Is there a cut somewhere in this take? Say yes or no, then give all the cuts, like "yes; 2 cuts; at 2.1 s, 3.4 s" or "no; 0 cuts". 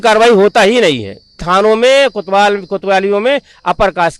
yes; 1 cut; at 1.4 s